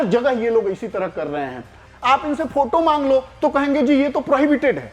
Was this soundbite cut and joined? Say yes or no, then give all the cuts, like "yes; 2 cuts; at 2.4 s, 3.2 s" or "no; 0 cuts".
yes; 1 cut; at 1.8 s